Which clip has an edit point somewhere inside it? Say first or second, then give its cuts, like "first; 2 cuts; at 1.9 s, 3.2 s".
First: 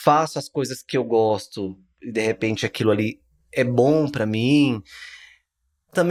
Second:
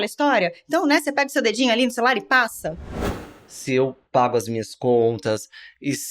second; 1 cut; at 3.1 s